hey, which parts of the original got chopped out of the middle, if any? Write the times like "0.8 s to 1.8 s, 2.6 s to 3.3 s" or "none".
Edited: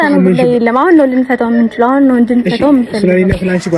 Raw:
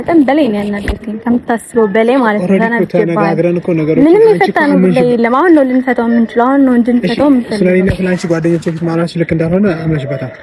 none